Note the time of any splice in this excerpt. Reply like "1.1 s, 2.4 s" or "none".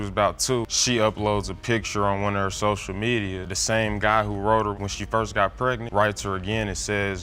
none